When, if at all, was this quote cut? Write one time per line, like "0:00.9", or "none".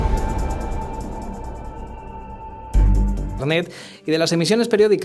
none